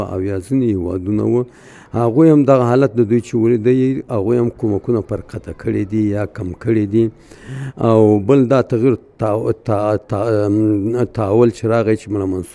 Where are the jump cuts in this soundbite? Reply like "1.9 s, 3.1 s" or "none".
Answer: none